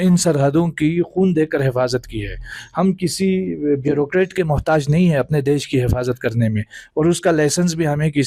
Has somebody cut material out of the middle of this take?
no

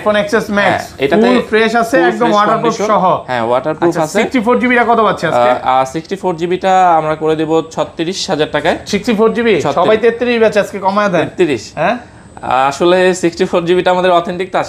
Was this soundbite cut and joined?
no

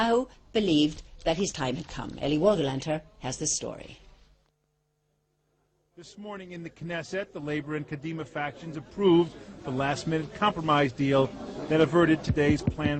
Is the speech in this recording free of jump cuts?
no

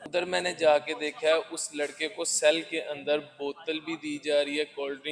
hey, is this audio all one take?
yes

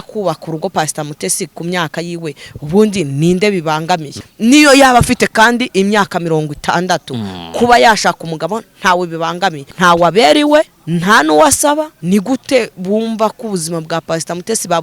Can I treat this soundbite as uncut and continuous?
no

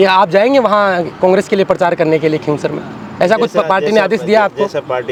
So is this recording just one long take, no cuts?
yes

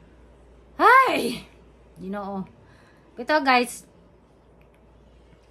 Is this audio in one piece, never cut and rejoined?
yes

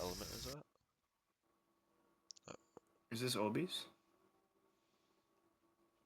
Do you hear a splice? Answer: yes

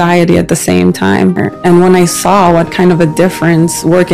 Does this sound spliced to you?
yes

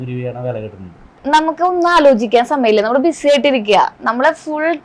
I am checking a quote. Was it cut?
yes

